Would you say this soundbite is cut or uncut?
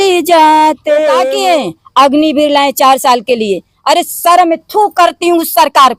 cut